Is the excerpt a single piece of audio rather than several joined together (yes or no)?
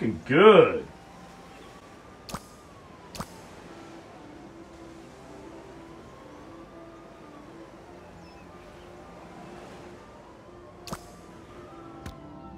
yes